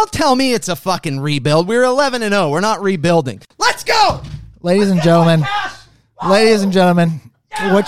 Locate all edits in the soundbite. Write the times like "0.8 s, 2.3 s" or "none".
3.4 s